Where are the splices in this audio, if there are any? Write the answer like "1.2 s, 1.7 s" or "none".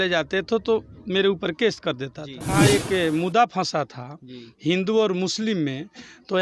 2.5 s